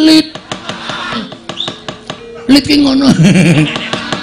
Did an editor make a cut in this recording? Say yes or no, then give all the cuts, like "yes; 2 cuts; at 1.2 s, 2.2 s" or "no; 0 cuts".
yes; 1 cut; at 1.3 s